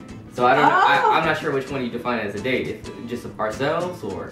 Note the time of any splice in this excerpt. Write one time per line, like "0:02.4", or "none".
0:02.7